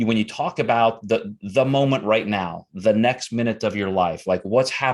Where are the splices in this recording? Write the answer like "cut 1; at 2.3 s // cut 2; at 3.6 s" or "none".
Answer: none